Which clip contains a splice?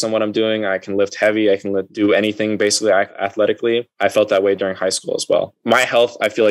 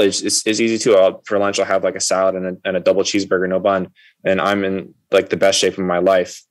first; 3 cuts; at 1.9 s, 3.1 s, 5.6 s

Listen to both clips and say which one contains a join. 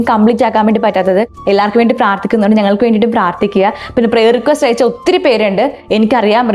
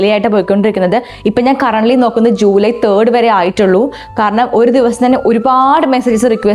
first; 1 cut; at 1.4 s

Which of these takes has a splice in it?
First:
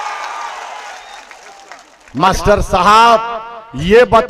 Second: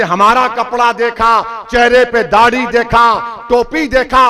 first; 1 cut; at 2.3 s

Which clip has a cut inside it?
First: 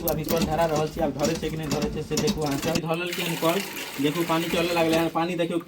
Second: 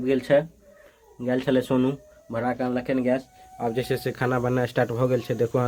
first; 1 cut; at 2.8 s

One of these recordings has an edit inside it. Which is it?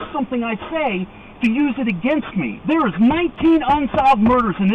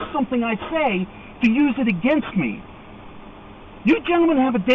first; 1 cut; at 2.5 s

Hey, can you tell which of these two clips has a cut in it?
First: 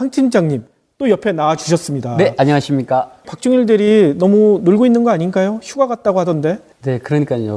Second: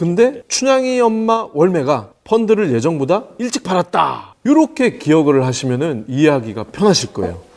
second; 1 cut; at 2.1 s

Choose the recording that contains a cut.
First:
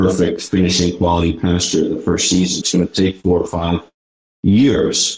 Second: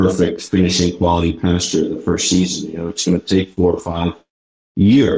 first; 1 cut; at 2.6 s

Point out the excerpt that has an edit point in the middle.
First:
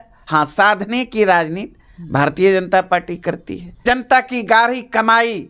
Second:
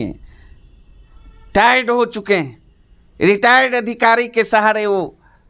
first; 1 cut; at 3.7 s

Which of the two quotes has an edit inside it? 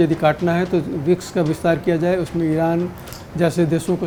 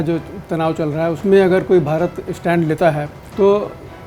second; 2 cuts; at 1.2 s, 3.2 s

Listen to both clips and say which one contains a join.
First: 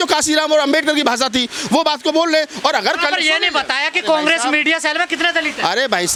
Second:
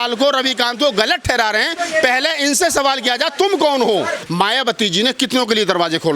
second; 1 cut; at 4.2 s

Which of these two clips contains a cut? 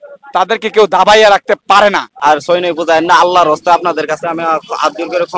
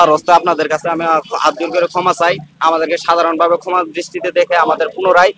first; 1 cut; at 2.1 s

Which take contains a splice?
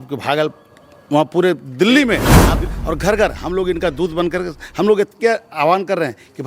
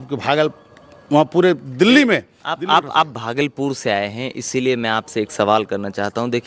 first; 1 cut; at 2.6 s

